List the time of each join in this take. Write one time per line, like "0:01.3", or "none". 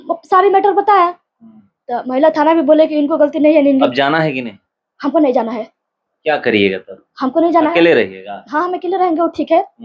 0:03.9